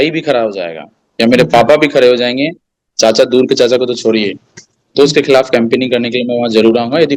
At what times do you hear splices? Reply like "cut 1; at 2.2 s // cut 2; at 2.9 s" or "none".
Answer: none

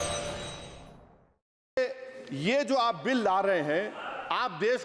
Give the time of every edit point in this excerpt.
cut 1; at 1.8 s

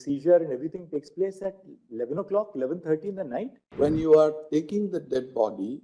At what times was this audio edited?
cut 1; at 3.6 s

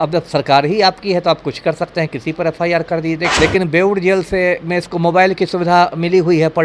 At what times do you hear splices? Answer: cut 1; at 3.3 s

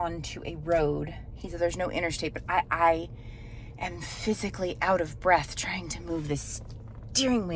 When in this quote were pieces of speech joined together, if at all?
none

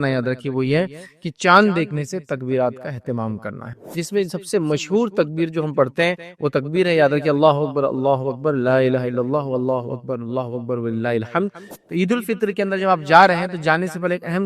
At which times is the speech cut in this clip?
cut 1; at 3.9 s // cut 2; at 11.7 s

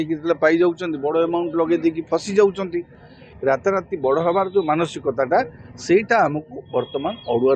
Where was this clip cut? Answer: cut 1; at 3.2 s

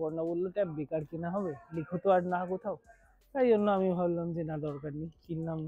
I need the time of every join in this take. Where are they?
none

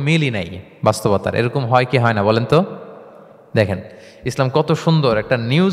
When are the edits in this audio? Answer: none

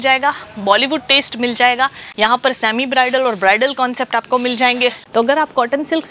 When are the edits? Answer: cut 1; at 2.0 s // cut 2; at 5.0 s

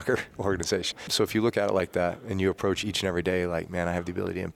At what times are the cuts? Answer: cut 1; at 1.1 s // cut 2; at 2.8 s

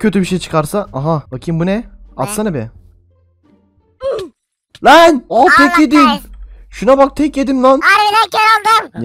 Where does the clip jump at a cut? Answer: cut 1; at 1.3 s // cut 2; at 7.9 s

